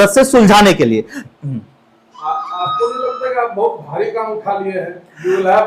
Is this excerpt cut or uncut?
cut